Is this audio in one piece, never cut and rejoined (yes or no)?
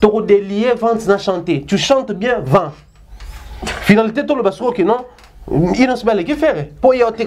yes